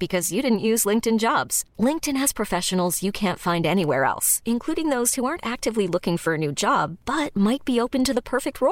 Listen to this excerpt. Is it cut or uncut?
uncut